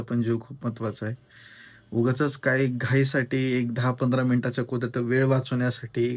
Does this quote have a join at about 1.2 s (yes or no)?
no